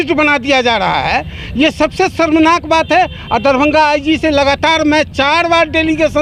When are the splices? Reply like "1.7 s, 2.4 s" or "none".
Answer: none